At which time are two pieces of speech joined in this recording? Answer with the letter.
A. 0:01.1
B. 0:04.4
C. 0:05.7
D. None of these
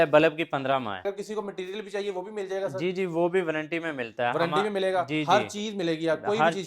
A